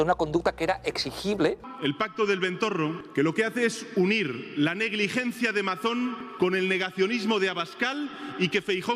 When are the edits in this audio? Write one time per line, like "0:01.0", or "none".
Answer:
0:01.7
0:03.0
0:06.2